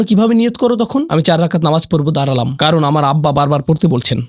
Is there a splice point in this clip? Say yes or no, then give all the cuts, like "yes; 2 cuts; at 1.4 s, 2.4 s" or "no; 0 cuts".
no; 0 cuts